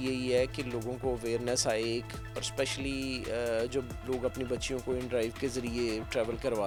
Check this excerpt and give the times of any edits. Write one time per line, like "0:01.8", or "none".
none